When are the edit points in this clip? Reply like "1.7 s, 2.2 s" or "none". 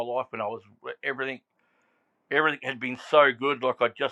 none